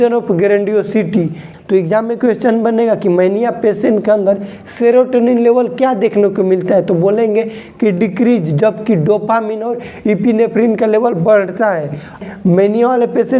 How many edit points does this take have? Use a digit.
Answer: 2